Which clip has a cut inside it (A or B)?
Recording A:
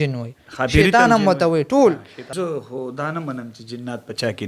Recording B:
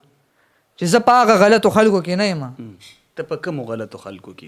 A